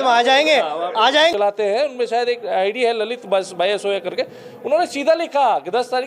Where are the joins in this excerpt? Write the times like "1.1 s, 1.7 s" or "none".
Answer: 1.3 s